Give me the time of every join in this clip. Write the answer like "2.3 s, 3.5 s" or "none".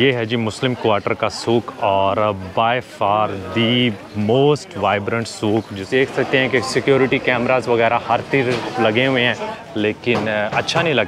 5.8 s, 9.5 s